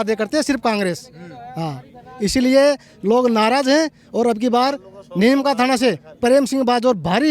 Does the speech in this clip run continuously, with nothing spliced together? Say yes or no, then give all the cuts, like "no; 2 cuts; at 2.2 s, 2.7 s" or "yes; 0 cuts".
yes; 0 cuts